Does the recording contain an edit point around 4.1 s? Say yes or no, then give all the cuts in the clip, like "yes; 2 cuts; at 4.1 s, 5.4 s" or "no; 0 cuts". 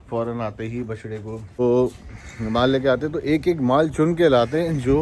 no; 1 cut; at 1.6 s